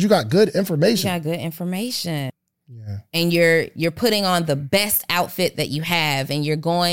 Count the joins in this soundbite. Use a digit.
1